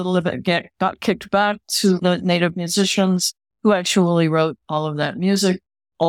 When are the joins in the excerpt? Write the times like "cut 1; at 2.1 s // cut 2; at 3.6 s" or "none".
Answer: none